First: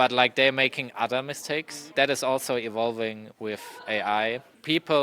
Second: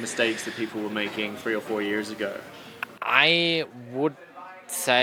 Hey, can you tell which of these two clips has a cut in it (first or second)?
first